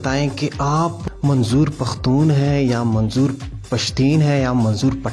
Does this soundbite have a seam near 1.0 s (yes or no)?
yes